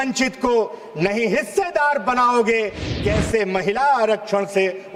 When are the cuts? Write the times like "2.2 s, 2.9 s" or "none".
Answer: none